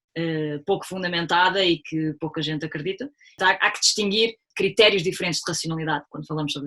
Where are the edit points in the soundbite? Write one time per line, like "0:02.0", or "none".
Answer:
0:03.4
0:04.5